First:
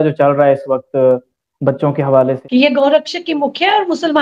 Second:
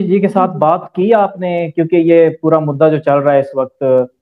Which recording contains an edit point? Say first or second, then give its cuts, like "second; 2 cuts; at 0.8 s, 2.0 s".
first; 1 cut; at 2.4 s